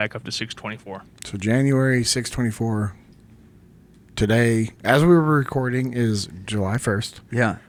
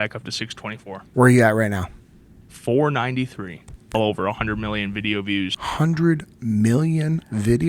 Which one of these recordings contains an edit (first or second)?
second